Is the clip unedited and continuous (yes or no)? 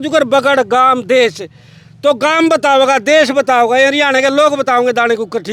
yes